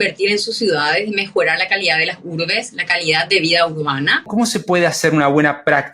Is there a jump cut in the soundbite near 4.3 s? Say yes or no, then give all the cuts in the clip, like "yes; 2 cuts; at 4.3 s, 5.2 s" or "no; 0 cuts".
yes; 1 cut; at 4.3 s